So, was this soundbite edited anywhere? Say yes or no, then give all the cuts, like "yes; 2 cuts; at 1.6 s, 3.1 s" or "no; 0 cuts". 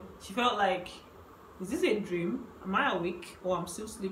no; 0 cuts